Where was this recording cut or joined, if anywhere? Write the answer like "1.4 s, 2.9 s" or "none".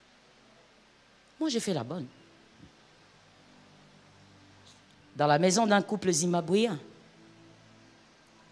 none